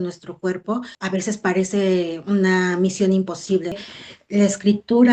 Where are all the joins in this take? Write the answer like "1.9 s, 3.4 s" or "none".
0.9 s, 3.9 s